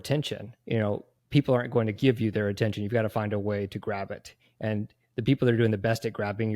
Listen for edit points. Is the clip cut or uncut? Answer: cut